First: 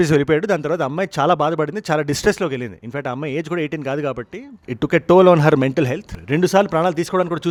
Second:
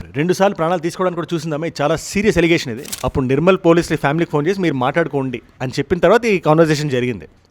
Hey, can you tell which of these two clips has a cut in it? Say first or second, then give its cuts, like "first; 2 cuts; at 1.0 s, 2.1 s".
second; 1 cut; at 2.9 s